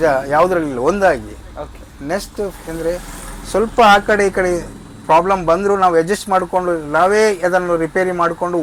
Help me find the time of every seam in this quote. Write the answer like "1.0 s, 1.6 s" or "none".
none